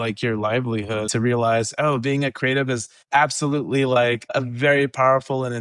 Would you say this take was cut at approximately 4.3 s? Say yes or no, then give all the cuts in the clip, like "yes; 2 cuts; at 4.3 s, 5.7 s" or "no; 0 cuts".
yes; 3 cuts; at 1.1 s, 2.9 s, 4.3 s